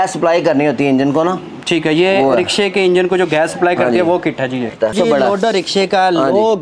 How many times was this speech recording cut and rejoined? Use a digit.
1